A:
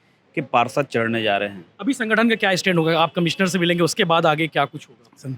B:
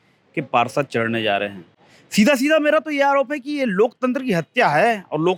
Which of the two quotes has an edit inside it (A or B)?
A